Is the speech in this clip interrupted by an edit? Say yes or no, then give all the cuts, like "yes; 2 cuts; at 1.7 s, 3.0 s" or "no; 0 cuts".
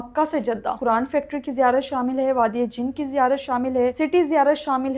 yes; 2 cuts; at 0.8 s, 3.9 s